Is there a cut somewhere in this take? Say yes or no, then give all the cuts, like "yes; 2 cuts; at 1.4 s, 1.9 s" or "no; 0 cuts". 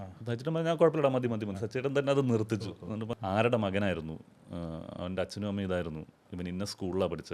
yes; 1 cut; at 3.1 s